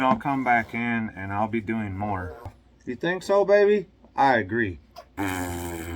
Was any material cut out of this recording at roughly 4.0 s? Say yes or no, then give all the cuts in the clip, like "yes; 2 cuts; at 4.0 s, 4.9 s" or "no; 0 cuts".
no; 1 cut; at 2.6 s